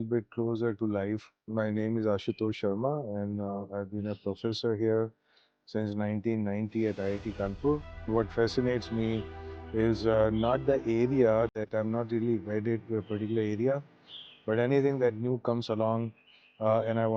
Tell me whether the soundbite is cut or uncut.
cut